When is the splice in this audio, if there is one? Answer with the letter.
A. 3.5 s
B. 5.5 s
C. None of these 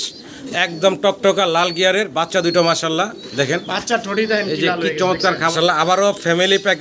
B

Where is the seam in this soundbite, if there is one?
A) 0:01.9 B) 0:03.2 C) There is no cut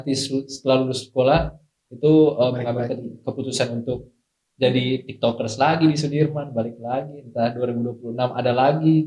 C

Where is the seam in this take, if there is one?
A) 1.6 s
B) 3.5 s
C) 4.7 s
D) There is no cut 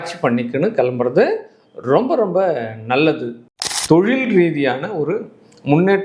B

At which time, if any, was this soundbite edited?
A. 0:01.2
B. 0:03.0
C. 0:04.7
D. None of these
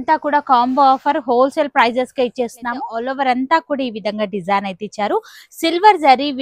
B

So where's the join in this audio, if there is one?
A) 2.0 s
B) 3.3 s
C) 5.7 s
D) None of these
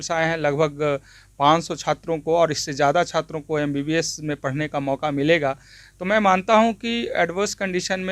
D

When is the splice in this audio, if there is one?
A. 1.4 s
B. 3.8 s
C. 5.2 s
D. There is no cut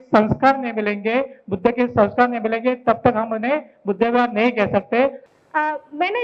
C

